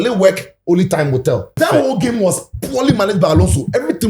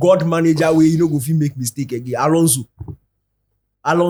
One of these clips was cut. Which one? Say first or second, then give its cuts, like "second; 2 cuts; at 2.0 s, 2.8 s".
first; 1 cut; at 1.6 s